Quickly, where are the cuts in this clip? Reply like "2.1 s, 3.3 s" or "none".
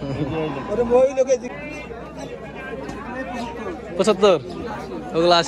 1.4 s